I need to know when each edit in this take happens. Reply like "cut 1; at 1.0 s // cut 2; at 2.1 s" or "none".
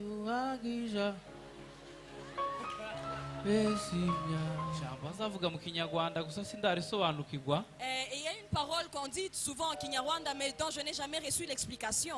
cut 1; at 5.0 s